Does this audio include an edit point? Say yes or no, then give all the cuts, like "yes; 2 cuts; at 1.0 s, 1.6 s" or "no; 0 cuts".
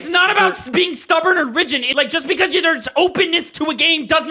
yes; 1 cut; at 1.9 s